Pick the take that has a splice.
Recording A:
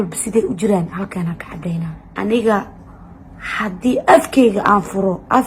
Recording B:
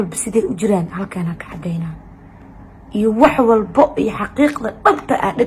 A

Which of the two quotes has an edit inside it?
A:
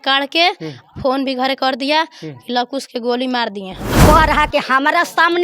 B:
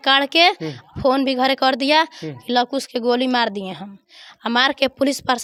A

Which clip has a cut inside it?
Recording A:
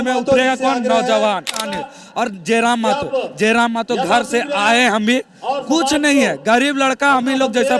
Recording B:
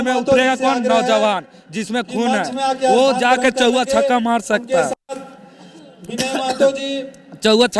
A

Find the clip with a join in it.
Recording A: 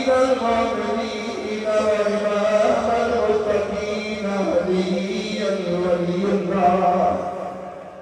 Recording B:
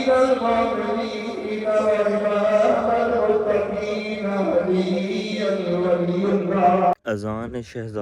B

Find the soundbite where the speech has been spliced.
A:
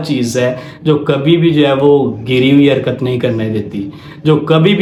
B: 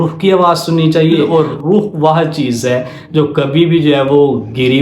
B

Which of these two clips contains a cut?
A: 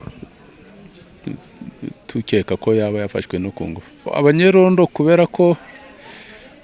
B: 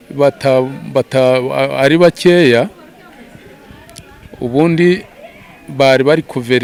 A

